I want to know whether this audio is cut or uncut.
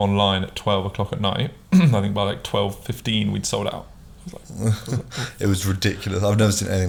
uncut